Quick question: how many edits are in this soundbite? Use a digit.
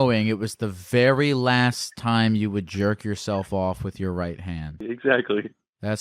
1